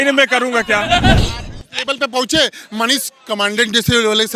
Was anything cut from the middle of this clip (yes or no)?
yes